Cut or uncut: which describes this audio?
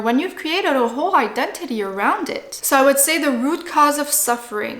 cut